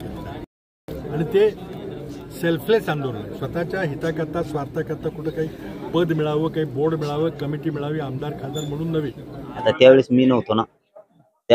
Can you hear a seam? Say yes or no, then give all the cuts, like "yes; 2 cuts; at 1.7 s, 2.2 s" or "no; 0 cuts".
yes; 1 cut; at 9.6 s